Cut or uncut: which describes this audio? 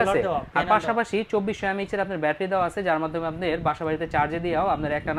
uncut